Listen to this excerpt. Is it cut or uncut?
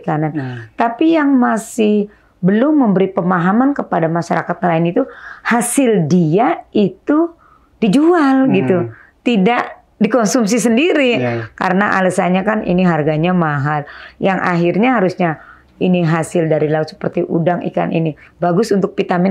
uncut